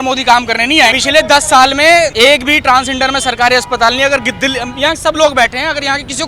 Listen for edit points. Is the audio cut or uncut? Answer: cut